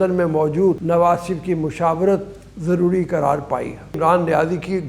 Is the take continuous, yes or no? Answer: no